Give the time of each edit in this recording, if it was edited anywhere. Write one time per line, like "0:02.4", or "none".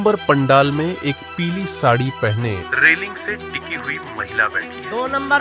none